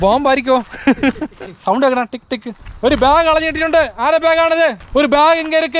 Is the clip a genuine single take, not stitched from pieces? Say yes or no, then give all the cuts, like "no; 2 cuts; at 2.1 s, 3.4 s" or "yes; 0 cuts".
no; 3 cuts; at 1.5 s, 2.6 s, 4.8 s